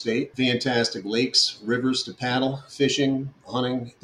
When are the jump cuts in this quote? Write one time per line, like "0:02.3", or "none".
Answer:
0:02.6